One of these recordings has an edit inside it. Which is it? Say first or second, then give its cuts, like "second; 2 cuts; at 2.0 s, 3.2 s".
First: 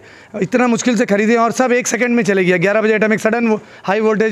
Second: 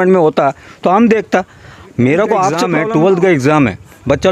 second; 1 cut; at 2.6 s